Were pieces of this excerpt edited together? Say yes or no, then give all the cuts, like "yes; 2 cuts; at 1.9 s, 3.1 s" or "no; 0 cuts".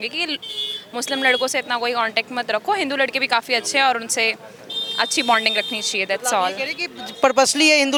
no; 0 cuts